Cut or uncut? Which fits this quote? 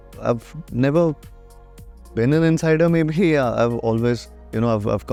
uncut